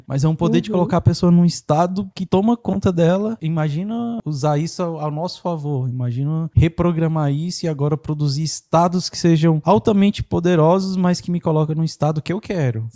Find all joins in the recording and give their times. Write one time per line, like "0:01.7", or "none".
0:02.1
0:04.2